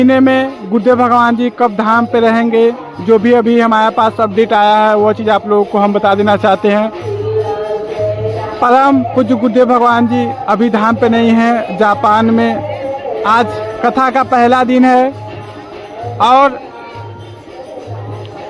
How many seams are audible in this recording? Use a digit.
0